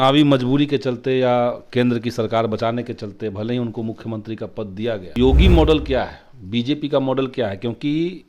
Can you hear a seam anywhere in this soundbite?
yes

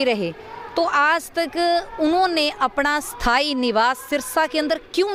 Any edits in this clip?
no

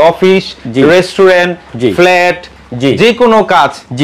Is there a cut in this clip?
no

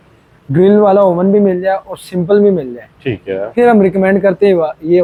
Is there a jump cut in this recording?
no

